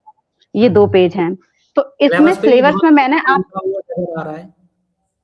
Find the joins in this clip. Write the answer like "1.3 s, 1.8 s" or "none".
none